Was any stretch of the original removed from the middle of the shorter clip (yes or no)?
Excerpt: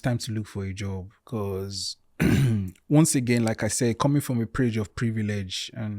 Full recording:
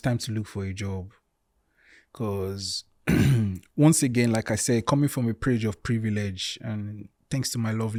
yes